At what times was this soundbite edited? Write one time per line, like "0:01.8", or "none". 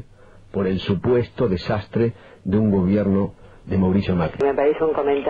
0:04.4